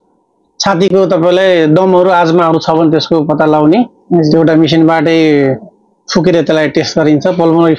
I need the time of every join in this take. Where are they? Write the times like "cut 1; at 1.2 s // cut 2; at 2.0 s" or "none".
none